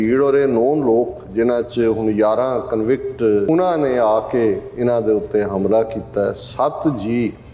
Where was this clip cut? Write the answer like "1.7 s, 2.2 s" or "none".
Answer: 3.5 s